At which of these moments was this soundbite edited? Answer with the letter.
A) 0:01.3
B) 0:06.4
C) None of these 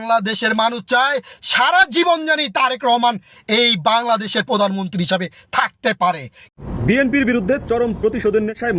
B